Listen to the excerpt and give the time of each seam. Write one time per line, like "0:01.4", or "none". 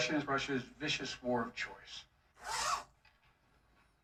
none